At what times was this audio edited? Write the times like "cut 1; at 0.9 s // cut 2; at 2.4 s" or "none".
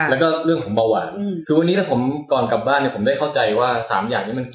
cut 1; at 1.4 s